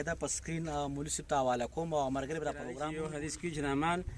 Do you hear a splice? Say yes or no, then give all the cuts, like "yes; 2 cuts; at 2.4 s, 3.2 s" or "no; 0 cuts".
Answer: yes; 1 cut; at 2.8 s